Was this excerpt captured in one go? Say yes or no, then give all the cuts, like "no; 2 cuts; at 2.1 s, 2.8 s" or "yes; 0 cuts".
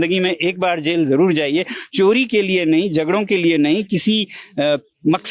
yes; 0 cuts